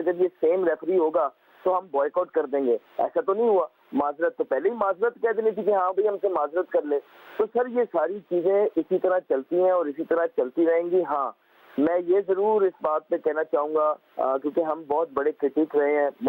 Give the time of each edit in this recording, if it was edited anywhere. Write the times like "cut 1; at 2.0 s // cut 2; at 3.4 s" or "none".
none